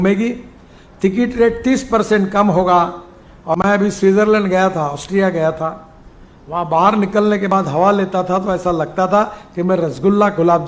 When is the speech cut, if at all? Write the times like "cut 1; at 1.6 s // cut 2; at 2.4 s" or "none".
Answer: cut 1; at 3.6 s